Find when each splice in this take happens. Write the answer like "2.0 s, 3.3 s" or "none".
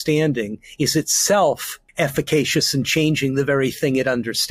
1.8 s